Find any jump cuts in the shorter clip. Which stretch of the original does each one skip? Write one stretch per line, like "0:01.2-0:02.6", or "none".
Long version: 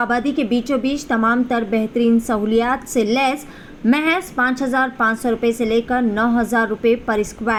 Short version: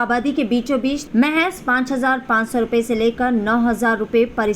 0:01.0-0:03.7